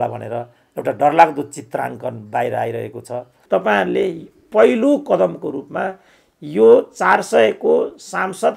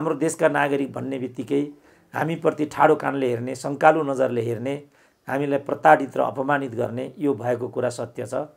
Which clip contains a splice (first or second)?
first